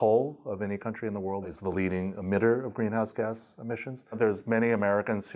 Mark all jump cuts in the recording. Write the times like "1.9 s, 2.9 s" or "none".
1.5 s, 4.2 s